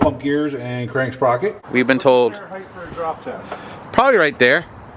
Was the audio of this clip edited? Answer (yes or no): yes